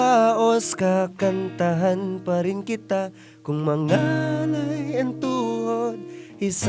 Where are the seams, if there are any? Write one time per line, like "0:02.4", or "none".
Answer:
none